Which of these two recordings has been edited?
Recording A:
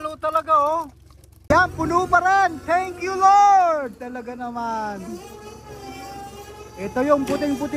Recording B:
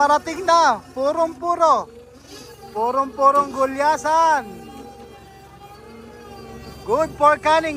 A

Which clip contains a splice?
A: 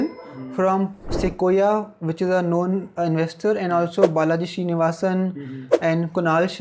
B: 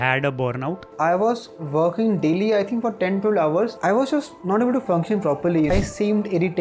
B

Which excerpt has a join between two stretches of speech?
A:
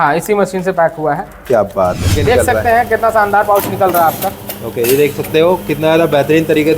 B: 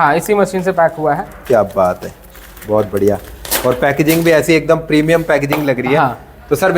A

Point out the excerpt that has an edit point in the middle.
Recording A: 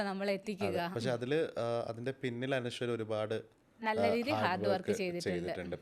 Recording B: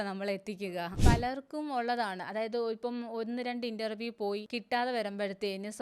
B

